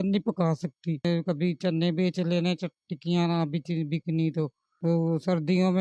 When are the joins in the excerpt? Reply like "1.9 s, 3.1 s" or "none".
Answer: 1.1 s